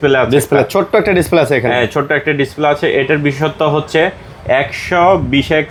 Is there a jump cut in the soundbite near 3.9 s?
no; 0 cuts

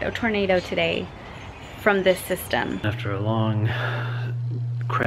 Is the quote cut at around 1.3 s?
no; 1 cut; at 2.9 s

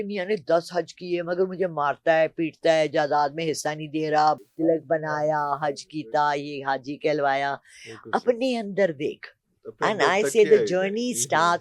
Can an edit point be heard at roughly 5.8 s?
no; 1 cut; at 4.4 s

